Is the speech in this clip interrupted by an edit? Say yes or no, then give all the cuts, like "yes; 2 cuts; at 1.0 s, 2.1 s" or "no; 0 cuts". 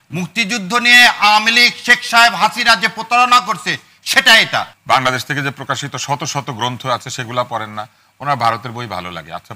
yes; 1 cut; at 4.7 s